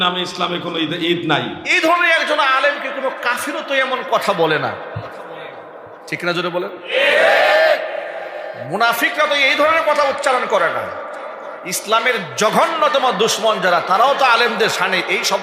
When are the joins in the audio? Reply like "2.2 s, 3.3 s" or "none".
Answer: 1.6 s